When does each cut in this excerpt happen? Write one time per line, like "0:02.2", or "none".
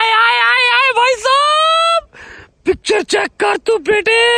none